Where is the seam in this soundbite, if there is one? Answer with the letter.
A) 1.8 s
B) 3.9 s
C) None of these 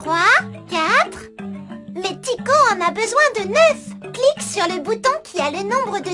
C